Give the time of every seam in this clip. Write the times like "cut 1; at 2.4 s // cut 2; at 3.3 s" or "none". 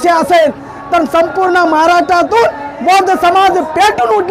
none